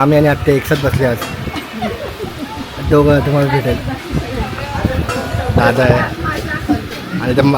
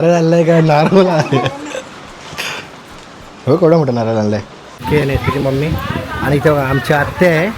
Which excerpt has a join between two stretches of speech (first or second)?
second